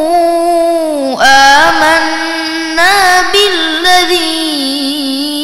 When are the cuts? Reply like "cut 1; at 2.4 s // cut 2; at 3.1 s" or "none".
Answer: none